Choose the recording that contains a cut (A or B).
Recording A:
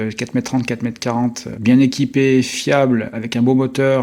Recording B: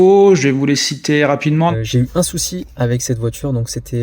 B